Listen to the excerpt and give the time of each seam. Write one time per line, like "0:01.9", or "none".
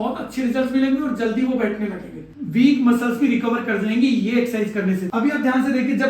0:02.3
0:05.1